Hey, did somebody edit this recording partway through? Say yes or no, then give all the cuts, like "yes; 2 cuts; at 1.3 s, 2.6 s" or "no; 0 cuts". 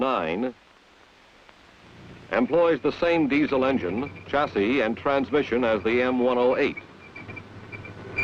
no; 0 cuts